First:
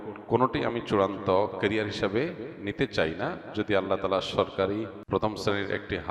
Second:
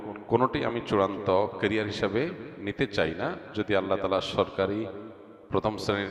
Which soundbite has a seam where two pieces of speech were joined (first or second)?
first